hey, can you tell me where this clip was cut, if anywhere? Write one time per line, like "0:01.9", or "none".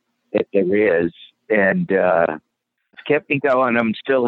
0:03.0